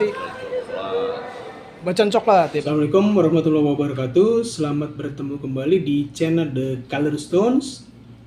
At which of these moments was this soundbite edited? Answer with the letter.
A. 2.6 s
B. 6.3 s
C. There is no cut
A